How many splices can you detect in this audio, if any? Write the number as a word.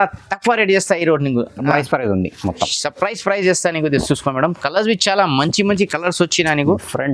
one